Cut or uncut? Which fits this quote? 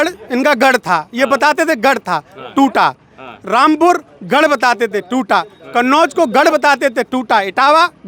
uncut